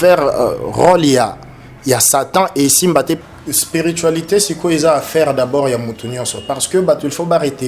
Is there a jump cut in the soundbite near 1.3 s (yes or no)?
no